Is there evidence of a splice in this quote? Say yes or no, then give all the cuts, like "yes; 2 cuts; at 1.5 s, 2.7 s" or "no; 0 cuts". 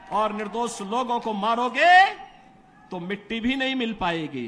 no; 0 cuts